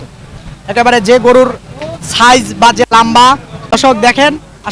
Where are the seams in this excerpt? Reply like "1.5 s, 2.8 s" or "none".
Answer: 3.8 s